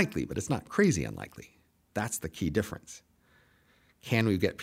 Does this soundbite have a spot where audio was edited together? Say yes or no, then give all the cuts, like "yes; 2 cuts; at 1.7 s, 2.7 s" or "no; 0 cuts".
no; 0 cuts